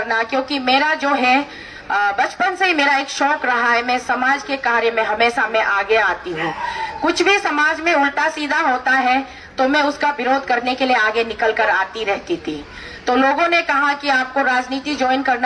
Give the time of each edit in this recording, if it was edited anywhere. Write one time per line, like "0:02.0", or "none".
none